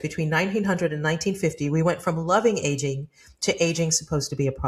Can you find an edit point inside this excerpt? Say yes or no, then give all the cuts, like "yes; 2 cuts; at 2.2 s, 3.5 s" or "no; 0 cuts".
no; 0 cuts